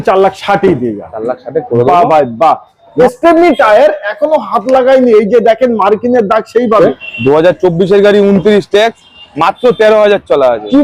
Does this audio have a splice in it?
yes; 2 cuts; at 2.9 s, 6.8 s

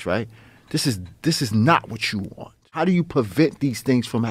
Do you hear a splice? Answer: yes; 1 cut; at 2.7 s

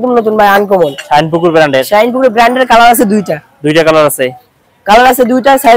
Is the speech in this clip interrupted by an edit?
no; 0 cuts

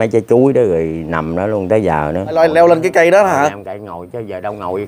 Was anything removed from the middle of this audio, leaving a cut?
yes; 1 cut; at 2.3 s

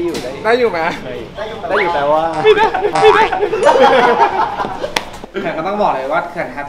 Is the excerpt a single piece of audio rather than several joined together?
no; 1 cut; at 5.2 s

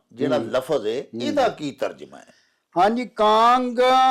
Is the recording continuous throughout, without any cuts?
yes; 0 cuts

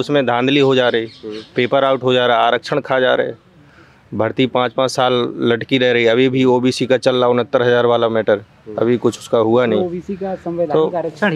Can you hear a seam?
no; 0 cuts

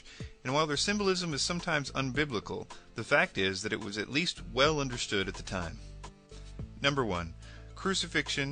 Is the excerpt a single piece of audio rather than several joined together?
no; 1 cut; at 5.8 s

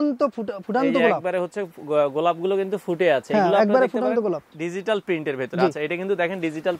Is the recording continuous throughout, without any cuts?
no; 1 cut; at 4.5 s

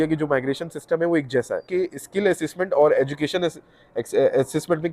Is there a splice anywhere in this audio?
yes; 1 cut; at 1.7 s

